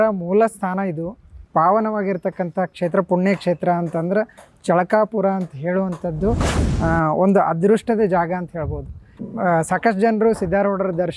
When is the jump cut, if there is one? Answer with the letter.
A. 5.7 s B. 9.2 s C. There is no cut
B